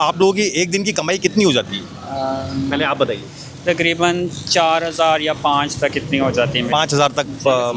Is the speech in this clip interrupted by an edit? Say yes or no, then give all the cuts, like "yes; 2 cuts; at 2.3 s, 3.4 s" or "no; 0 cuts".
no; 0 cuts